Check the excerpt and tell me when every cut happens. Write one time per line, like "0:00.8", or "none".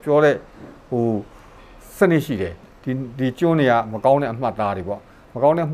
0:02.7